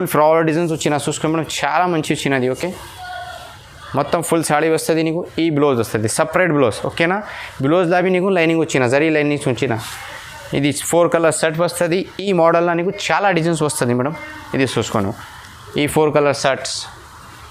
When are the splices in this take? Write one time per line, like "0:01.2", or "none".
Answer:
none